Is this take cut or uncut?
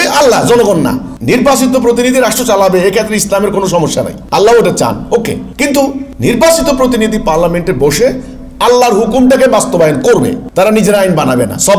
cut